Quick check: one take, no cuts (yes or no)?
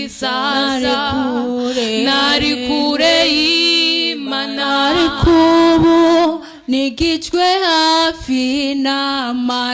yes